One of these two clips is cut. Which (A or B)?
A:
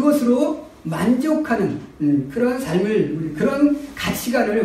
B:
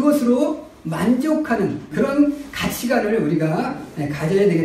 B